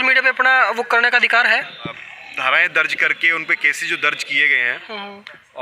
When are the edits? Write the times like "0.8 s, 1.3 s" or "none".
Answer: 1.9 s